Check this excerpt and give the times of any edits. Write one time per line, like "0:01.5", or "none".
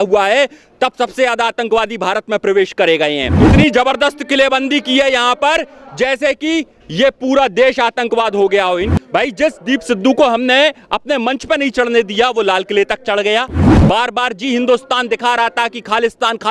0:03.4
0:08.9
0:13.7